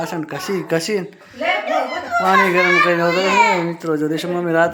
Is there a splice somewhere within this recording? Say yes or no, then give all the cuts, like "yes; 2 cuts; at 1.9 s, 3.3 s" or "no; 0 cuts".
no; 0 cuts